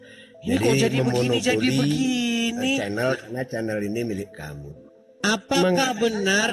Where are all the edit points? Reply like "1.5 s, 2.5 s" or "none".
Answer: 5.1 s